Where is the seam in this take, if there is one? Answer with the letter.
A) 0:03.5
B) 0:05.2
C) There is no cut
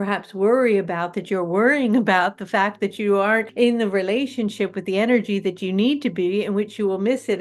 A